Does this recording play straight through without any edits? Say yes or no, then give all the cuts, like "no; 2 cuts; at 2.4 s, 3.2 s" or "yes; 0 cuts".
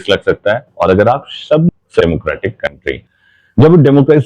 no; 1 cut; at 1.7 s